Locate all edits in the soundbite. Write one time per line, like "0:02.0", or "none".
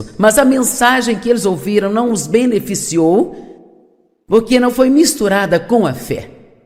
0:05.5